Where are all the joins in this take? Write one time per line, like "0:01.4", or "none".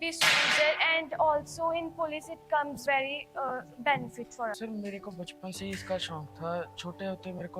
0:02.8
0:04.6